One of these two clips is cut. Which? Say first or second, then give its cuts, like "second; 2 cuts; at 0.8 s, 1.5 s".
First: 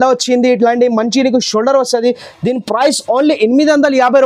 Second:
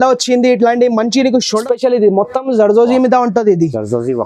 second; 1 cut; at 1.5 s